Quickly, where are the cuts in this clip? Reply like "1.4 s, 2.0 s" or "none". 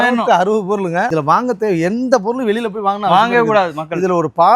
1.1 s